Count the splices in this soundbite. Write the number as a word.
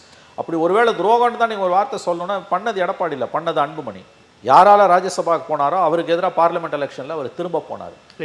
zero